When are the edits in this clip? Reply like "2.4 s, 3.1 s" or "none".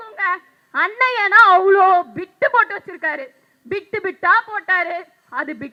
none